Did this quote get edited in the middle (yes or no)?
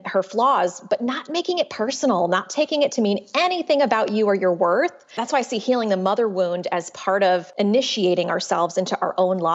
yes